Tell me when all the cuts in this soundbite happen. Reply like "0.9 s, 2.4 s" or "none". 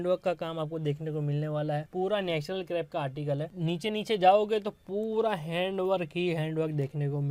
none